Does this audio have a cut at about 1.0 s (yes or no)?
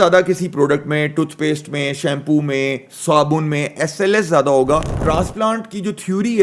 no